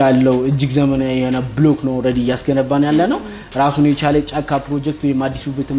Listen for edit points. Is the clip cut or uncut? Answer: uncut